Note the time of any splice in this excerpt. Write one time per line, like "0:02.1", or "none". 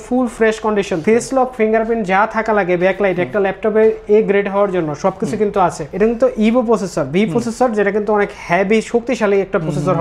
0:05.9

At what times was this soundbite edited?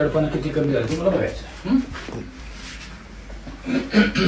none

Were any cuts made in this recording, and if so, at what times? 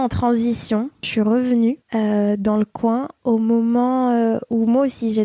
0:01.1
0:01.8

